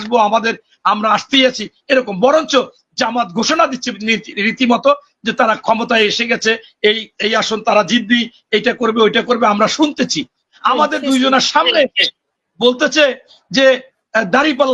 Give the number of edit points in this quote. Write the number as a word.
one